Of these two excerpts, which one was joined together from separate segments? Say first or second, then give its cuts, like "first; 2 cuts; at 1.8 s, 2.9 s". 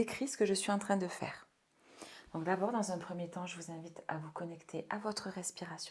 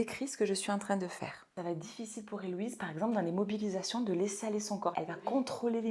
second; 2 cuts; at 1.5 s, 4.9 s